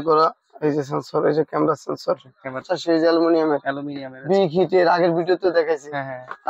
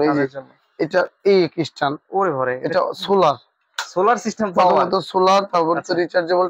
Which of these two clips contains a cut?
first; 1 cut; at 2.6 s

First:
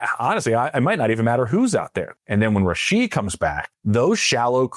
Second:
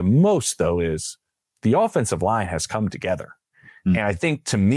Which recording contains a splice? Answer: first; 2 cuts; at 2.0 s, 3.7 s

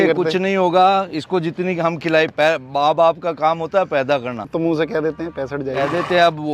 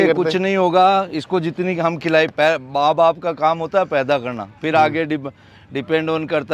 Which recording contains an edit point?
first; 1 cut; at 4.5 s

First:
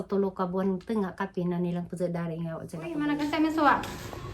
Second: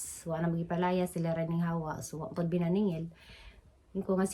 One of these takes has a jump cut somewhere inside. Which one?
first; 1 cut; at 3.0 s

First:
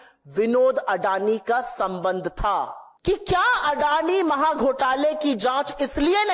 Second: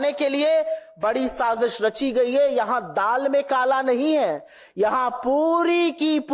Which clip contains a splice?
first; 1 cut; at 2.8 s

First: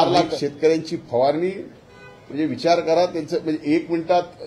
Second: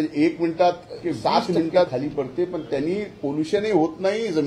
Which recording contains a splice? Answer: second; 1 cut; at 1.9 s

